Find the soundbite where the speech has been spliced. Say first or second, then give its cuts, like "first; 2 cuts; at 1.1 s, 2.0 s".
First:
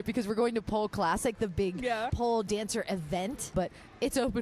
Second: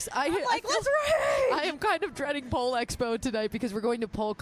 first; 2 cuts; at 2.1 s, 3.5 s